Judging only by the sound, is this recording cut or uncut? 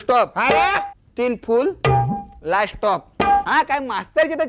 cut